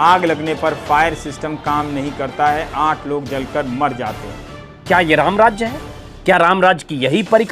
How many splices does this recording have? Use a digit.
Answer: 1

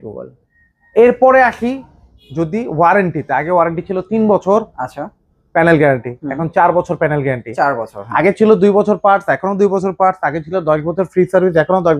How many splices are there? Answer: 0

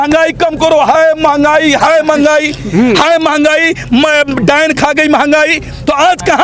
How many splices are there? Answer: 0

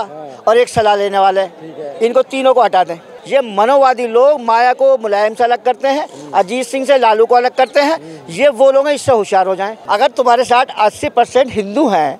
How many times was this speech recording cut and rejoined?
2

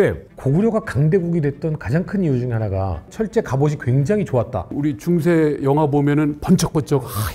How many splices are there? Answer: 2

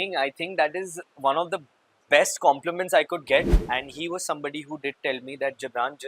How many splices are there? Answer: 1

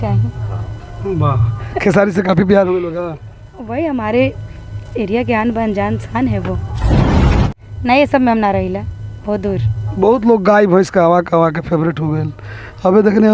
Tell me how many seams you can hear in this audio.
1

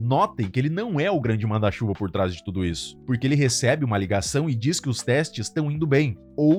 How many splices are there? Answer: 0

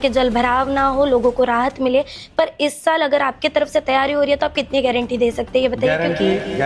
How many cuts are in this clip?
0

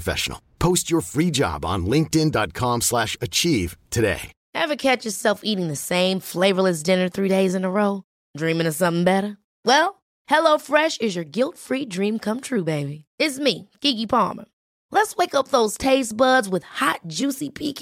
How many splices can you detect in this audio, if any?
1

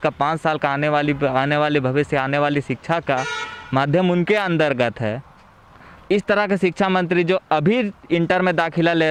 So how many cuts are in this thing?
0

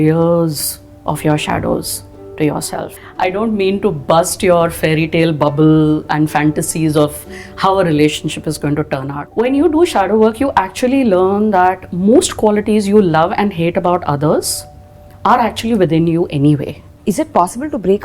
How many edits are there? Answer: 3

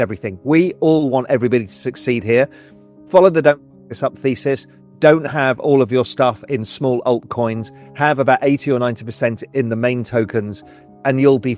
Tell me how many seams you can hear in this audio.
0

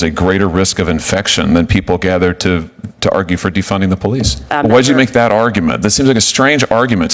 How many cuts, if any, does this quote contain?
1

